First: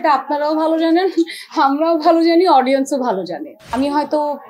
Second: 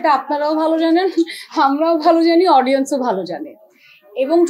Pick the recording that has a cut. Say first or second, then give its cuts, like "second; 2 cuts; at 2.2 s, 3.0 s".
first; 1 cut; at 3.6 s